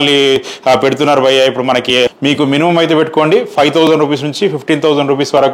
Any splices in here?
yes; 1 cut; at 2.1 s

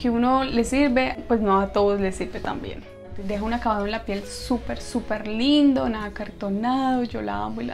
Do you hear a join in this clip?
yes; 2 cuts; at 1.2 s, 3.0 s

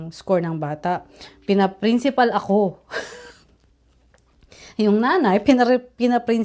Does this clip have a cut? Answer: no; 0 cuts

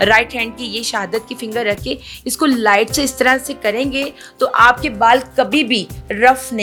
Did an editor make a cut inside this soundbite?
no; 0 cuts

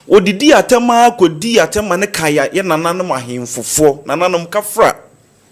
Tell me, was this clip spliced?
no; 0 cuts

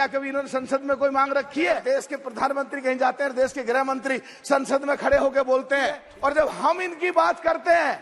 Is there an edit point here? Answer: yes; 2 cuts; at 1.8 s, 6.1 s

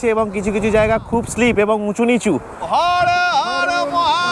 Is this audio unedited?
no; 1 cut; at 2.5 s

